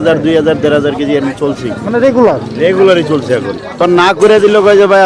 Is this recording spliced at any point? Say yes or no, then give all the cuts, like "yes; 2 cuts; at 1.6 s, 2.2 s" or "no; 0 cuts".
yes; 1 cut; at 3.8 s